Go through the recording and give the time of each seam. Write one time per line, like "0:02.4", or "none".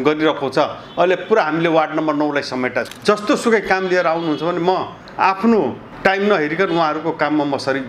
0:02.9
0:05.0
0:05.8